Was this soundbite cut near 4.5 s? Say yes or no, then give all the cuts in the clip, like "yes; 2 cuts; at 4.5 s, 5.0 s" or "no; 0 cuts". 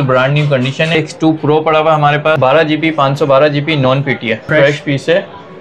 yes; 3 cuts; at 0.9 s, 2.4 s, 4.5 s